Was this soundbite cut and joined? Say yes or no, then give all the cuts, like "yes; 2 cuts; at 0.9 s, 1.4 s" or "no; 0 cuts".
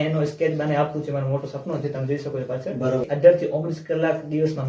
yes; 1 cut; at 3.1 s